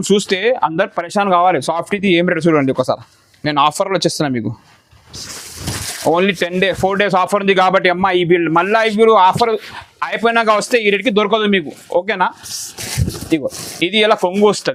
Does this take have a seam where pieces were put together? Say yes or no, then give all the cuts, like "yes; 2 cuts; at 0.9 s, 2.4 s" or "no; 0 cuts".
no; 0 cuts